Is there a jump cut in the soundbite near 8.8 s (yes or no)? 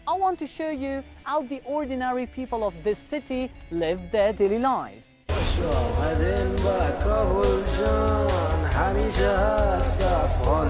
no